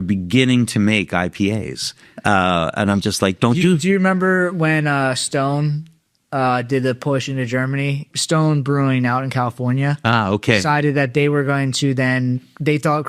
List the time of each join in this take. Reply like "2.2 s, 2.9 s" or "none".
8.1 s